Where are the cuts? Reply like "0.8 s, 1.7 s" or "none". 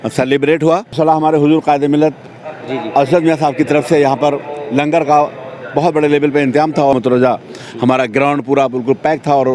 1.0 s, 6.9 s

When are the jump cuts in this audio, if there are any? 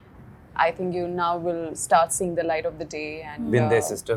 none

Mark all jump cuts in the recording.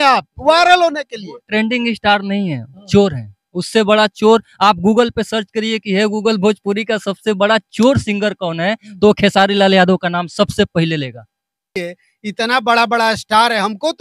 11.8 s

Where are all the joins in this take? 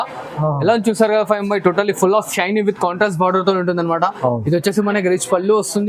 none

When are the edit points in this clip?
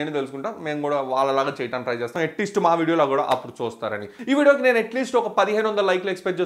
2.1 s

